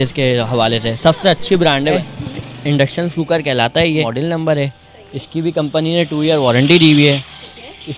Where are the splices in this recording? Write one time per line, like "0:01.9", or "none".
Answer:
0:02.0
0:04.0